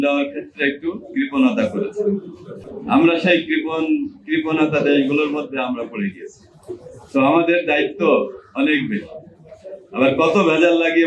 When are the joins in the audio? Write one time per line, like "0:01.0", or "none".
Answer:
none